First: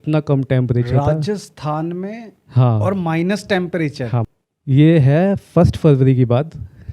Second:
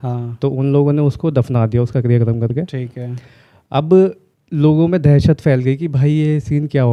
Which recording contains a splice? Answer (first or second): first